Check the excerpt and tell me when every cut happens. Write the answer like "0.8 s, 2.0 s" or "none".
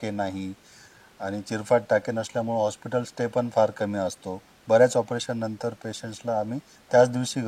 none